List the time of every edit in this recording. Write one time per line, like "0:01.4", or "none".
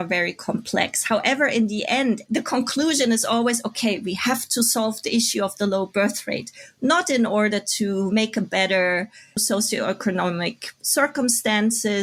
none